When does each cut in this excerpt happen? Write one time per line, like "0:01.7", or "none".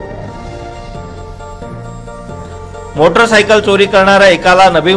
0:01.9